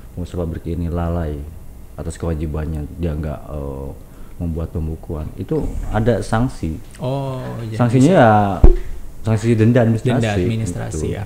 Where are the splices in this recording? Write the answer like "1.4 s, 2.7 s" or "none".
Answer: none